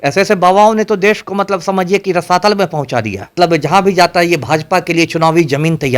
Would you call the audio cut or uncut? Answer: cut